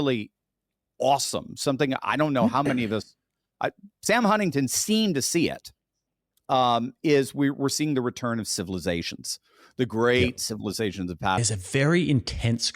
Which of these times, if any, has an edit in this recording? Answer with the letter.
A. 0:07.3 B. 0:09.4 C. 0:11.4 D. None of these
C